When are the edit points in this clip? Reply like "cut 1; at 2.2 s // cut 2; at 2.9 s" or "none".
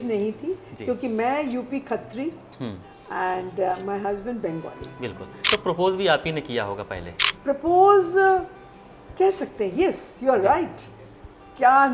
cut 1; at 5.3 s